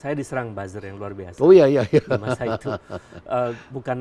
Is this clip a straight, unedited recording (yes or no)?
yes